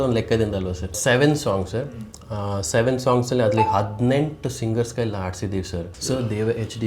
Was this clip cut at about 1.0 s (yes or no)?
yes